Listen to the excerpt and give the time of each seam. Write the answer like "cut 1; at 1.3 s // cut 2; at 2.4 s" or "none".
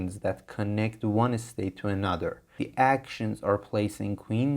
cut 1; at 2.5 s